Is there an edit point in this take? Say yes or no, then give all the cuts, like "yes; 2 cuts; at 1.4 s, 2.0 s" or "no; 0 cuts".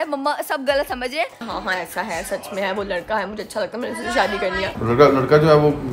yes; 2 cuts; at 1.4 s, 4.7 s